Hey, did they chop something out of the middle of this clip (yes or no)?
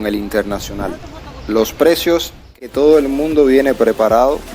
yes